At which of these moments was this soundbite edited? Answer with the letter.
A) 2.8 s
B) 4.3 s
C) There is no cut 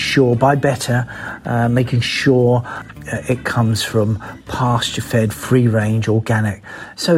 A